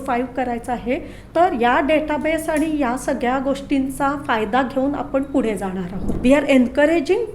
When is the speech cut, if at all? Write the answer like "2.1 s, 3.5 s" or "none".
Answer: 6.1 s